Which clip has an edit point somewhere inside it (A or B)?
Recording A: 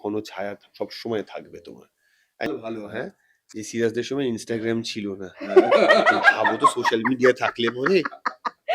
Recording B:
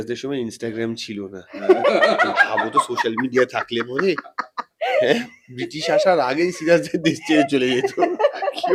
A